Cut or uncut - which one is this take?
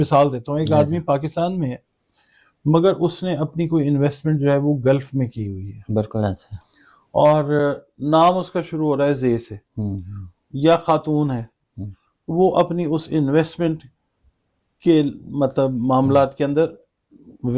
uncut